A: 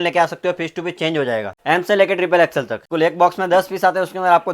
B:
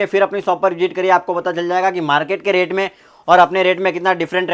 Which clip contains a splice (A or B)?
A